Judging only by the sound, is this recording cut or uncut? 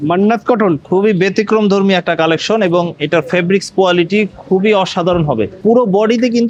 uncut